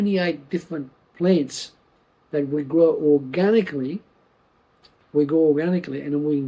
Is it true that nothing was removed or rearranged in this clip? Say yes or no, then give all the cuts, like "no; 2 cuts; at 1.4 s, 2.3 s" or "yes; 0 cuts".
no; 1 cut; at 4.8 s